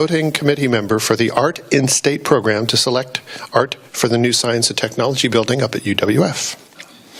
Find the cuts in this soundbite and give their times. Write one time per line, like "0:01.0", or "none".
none